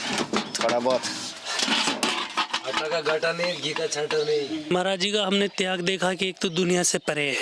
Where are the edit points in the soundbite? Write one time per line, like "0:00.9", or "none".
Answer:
0:04.7